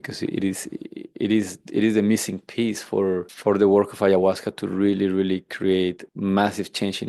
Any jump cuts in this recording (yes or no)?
no